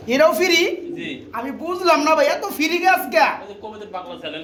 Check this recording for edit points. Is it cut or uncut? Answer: uncut